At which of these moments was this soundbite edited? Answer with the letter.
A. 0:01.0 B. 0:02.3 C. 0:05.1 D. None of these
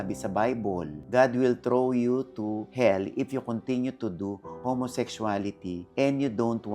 A